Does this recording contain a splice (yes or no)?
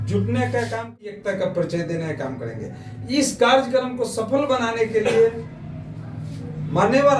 yes